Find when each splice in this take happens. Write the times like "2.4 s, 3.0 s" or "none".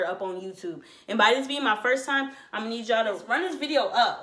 none